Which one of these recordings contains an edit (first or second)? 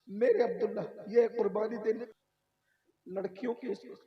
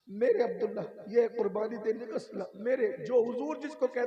first